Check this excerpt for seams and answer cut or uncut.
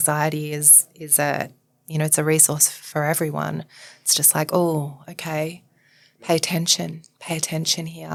uncut